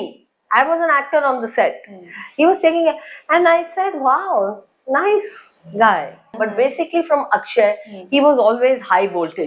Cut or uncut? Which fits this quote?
cut